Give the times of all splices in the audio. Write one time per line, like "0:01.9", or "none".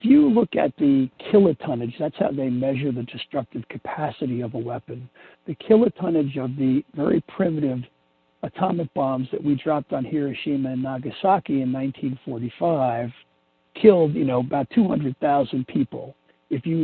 0:01.2

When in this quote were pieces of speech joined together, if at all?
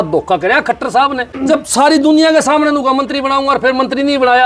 0:01.3

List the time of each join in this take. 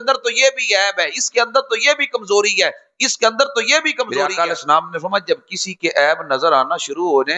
0:04.2

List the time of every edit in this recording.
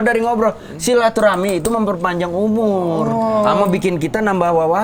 none

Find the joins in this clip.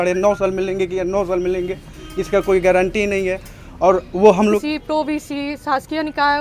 0:04.4

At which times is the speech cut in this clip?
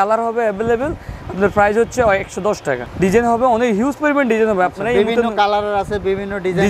0:02.8

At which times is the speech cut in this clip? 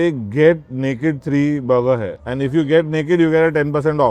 0:02.2

